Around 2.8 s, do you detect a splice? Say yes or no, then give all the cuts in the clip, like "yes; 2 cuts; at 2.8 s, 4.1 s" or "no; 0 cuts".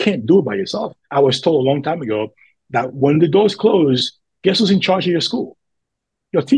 no; 1 cut; at 1.0 s